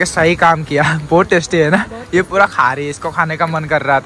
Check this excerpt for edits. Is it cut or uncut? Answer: uncut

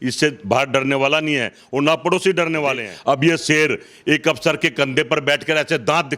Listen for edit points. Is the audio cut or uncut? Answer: cut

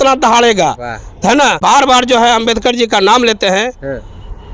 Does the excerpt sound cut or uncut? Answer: cut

